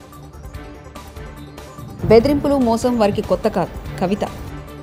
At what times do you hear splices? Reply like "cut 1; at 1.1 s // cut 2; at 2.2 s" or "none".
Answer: cut 1; at 1.4 s